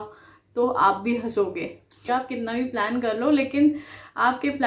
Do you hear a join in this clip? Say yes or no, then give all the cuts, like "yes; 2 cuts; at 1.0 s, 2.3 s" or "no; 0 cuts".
yes; 1 cut; at 2.0 s